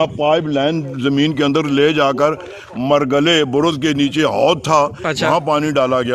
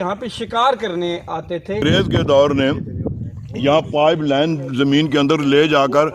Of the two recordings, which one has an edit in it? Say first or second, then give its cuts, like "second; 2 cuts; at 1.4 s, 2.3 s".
second; 1 cut; at 1.8 s